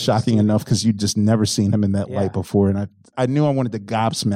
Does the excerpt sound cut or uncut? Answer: cut